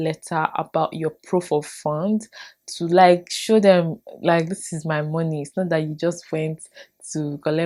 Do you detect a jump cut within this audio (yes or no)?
no